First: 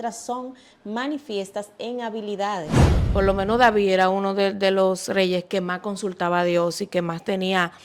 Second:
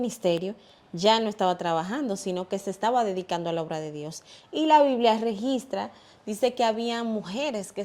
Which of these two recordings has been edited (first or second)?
first